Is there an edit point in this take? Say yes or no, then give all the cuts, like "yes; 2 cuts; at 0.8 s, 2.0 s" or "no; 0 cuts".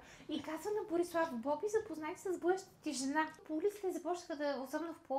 yes; 1 cut; at 3.4 s